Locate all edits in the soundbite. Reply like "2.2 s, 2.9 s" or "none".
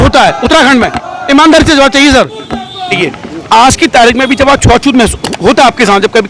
3.0 s